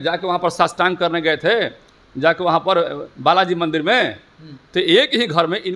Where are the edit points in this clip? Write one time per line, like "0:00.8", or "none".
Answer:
none